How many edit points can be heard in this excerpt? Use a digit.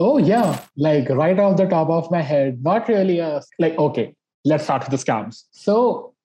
0